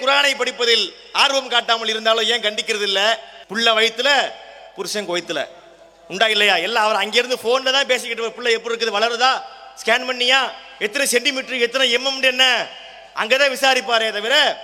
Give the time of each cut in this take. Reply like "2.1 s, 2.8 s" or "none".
3.4 s

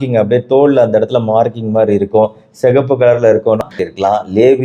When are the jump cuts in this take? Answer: 3.7 s

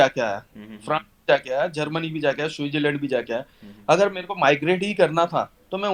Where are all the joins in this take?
none

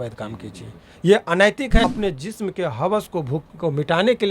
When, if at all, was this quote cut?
1.8 s

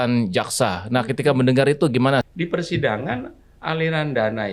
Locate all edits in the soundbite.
2.3 s

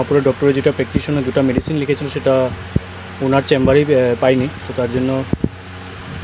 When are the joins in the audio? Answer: none

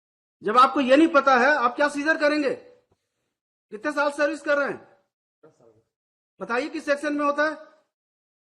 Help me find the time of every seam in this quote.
none

